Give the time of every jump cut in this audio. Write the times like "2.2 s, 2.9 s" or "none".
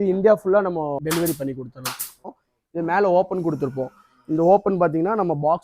1.0 s, 2.3 s